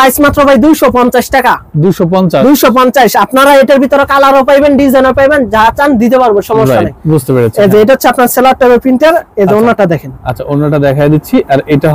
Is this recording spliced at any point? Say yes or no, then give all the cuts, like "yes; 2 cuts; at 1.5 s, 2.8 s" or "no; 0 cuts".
no; 0 cuts